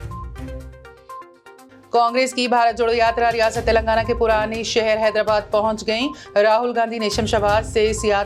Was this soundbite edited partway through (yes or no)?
yes